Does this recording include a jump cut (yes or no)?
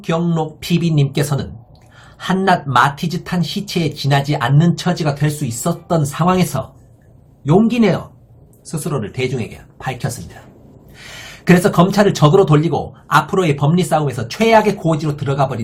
no